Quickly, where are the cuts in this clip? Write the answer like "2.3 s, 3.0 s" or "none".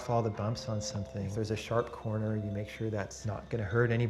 1.2 s